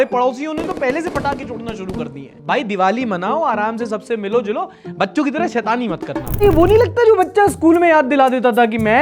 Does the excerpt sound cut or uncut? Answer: cut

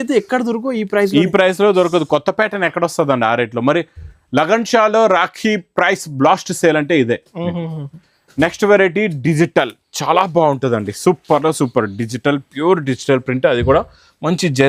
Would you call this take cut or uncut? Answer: uncut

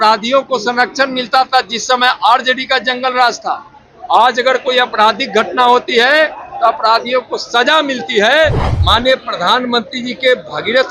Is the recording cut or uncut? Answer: cut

